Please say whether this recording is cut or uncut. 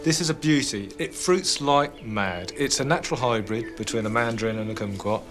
uncut